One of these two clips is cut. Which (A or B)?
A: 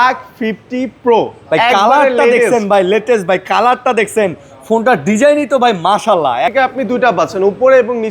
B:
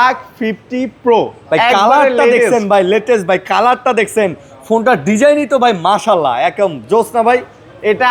A